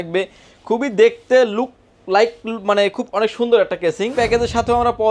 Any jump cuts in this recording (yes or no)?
yes